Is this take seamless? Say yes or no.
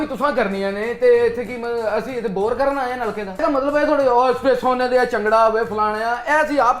no